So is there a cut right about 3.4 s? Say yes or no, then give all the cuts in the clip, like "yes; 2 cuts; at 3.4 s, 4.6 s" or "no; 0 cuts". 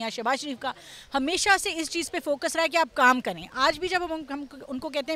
no; 0 cuts